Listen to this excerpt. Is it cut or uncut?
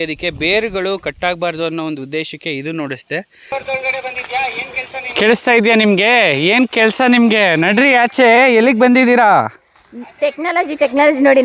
cut